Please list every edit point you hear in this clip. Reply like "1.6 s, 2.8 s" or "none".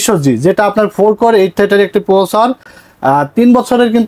none